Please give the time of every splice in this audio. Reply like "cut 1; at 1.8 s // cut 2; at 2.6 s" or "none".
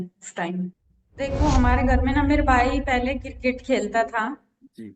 cut 1; at 1.0 s